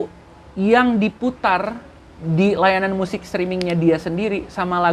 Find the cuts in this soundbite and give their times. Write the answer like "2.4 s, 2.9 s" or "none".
none